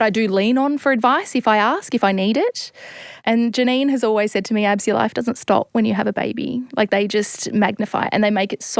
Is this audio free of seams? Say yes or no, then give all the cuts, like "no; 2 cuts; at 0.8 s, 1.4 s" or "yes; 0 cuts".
no; 1 cut; at 3.2 s